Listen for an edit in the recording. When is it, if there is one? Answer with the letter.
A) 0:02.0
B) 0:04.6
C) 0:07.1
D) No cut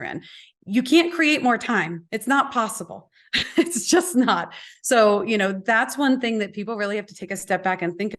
A